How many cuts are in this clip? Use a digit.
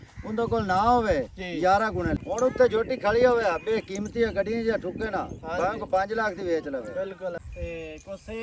2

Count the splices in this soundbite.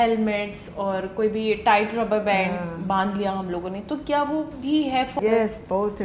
1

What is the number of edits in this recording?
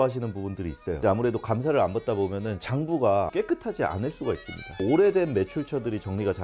2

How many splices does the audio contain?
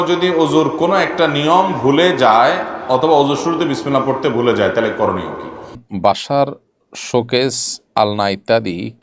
1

